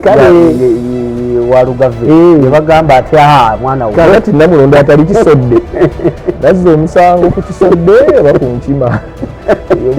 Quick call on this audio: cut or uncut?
uncut